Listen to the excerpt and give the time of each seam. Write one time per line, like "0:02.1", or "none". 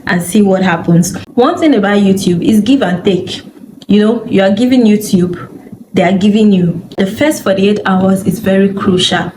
0:01.2
0:07.0